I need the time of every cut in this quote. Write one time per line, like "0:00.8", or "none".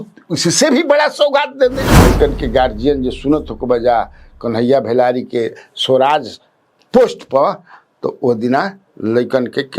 0:01.9